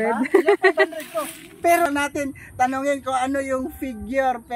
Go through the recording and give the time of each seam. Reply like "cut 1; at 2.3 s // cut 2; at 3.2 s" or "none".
cut 1; at 1.9 s